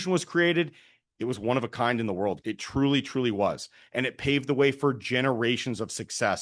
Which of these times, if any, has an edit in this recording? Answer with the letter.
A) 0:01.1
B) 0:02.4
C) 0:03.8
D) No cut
B